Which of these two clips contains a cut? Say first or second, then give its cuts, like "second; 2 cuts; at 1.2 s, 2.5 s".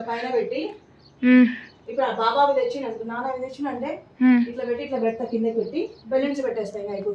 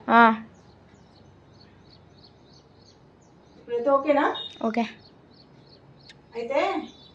second; 1 cut; at 3.4 s